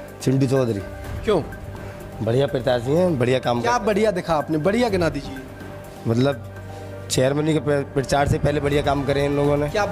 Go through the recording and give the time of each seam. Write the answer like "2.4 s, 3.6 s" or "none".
none